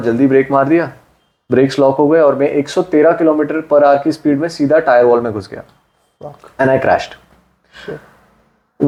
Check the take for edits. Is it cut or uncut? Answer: uncut